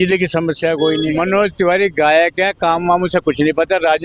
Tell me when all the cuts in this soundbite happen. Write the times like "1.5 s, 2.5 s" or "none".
1.1 s

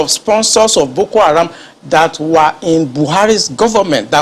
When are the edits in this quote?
none

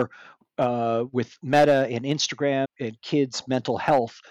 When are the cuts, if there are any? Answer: 2.7 s

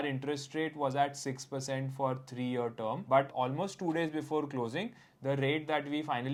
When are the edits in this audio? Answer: none

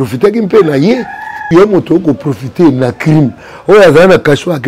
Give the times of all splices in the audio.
1.4 s

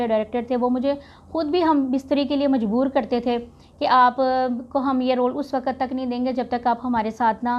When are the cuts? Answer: none

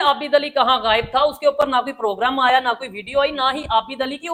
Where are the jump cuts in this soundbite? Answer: none

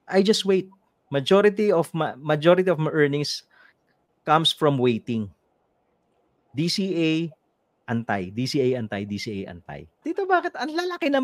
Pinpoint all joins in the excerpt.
10.0 s

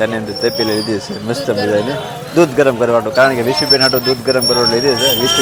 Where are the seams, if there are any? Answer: none

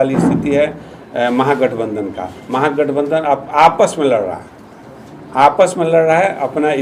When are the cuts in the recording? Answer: none

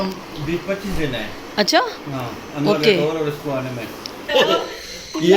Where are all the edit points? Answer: 4.3 s

